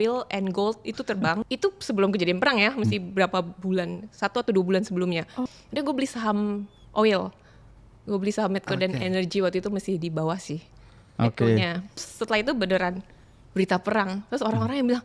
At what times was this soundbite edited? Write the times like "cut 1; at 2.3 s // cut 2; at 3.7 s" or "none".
cut 1; at 1.5 s // cut 2; at 5.4 s // cut 3; at 12.1 s